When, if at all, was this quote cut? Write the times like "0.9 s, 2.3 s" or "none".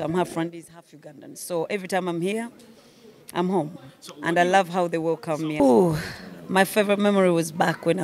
5.6 s